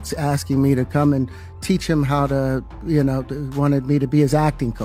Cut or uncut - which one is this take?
uncut